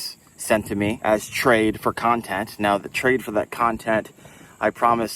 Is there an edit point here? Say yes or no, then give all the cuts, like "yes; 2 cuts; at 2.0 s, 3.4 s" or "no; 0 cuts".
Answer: yes; 1 cut; at 1.0 s